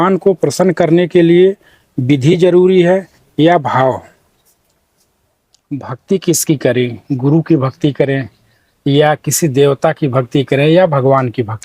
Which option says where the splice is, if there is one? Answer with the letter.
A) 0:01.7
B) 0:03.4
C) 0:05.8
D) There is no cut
C